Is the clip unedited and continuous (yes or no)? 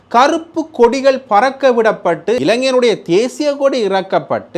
no